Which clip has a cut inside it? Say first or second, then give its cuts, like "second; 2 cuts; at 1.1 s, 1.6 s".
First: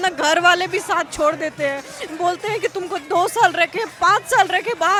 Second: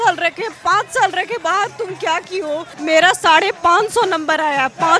second; 1 cut; at 2.7 s